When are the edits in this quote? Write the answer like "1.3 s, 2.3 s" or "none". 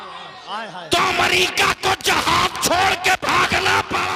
none

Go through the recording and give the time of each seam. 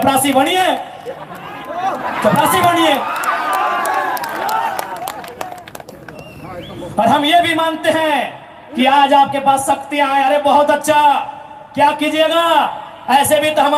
none

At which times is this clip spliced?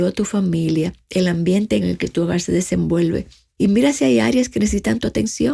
1.8 s, 3.4 s

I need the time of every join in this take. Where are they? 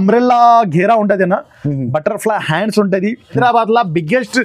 3.4 s

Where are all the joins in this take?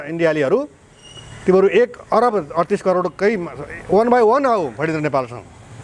none

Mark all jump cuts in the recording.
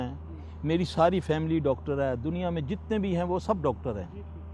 3.3 s

